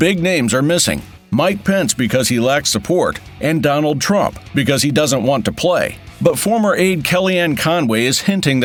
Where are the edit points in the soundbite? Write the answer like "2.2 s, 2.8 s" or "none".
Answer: none